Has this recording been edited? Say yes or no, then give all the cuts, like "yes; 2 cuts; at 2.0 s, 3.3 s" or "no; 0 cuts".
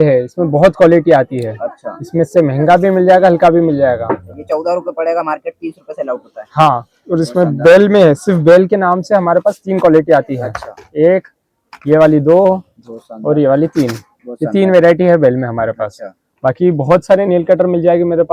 no; 0 cuts